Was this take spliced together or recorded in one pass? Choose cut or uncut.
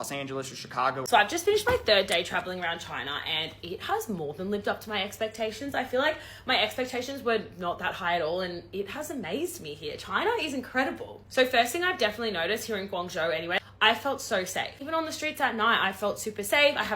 cut